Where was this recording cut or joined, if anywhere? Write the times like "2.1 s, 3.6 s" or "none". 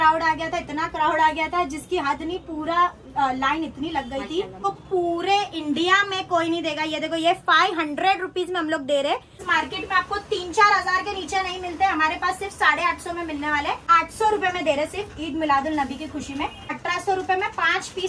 4.6 s, 9.4 s, 13.8 s, 16.7 s